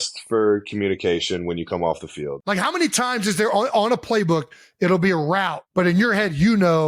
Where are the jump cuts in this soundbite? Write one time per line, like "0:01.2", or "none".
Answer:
0:02.4
0:05.5